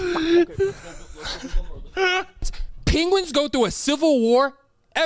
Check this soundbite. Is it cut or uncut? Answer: cut